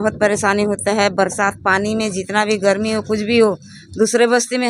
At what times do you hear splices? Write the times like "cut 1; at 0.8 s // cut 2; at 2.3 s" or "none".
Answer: none